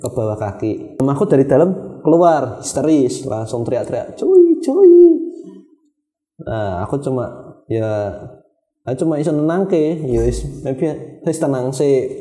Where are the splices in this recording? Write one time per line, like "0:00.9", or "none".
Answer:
0:01.0